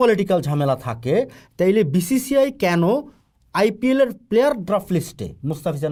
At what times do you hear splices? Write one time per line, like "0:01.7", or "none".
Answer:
none